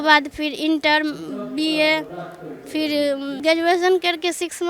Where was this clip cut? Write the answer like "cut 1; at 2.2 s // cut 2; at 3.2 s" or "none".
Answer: cut 1; at 3.4 s

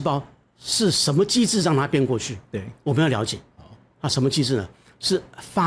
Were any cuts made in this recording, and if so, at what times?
none

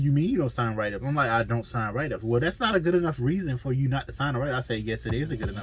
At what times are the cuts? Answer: none

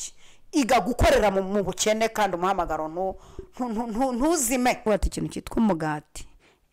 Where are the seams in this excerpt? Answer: cut 1; at 4.8 s

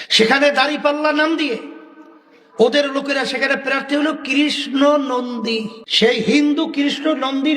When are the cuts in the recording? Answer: cut 1; at 5.8 s

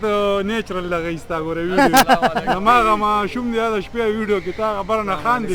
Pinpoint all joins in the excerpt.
none

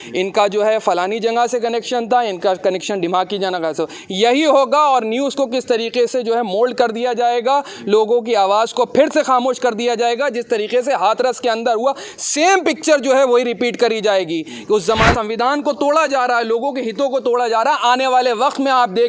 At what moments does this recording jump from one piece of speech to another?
cut 1; at 15.1 s

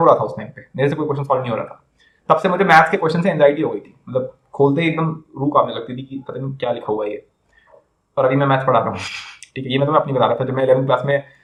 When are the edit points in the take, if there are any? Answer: none

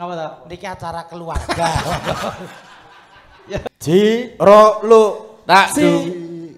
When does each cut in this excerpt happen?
cut 1; at 3.7 s

